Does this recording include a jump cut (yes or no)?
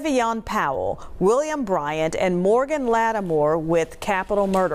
no